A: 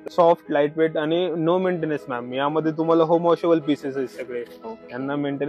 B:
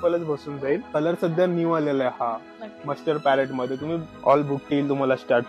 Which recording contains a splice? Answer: B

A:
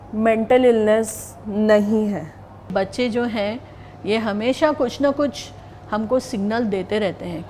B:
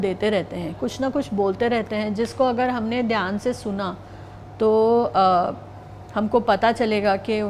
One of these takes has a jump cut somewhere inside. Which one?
A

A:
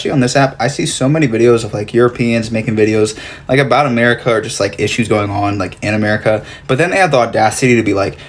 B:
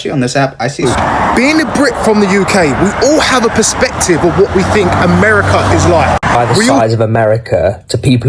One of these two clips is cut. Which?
B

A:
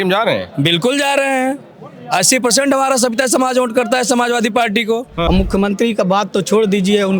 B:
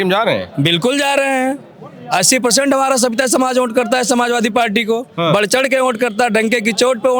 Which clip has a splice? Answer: A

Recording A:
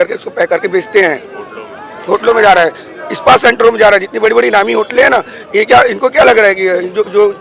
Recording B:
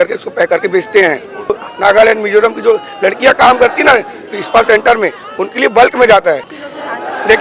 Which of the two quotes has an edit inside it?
B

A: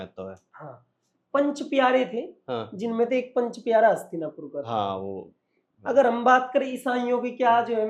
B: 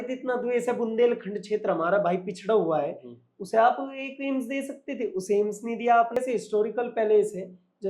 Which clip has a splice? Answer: B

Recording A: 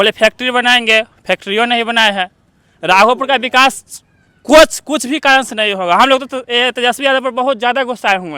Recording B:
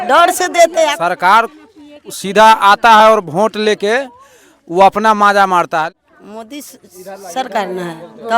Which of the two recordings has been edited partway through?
B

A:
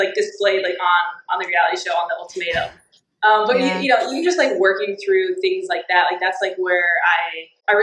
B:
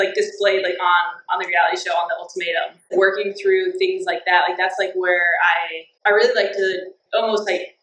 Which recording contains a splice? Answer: B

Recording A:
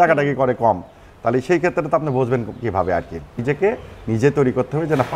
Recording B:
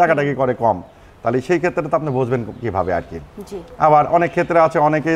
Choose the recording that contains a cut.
A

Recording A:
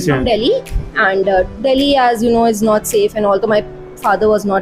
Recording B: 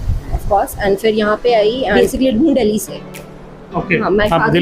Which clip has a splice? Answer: B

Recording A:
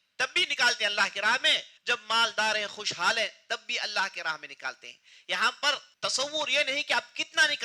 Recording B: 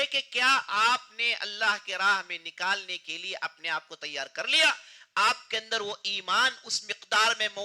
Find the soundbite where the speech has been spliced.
A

